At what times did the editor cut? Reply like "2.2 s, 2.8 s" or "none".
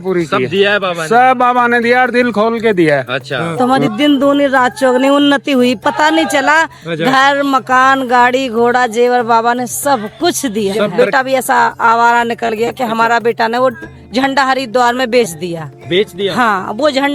3.4 s, 10.9 s